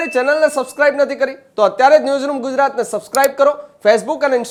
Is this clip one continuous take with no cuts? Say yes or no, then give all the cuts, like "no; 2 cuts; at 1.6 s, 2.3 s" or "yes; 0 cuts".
yes; 0 cuts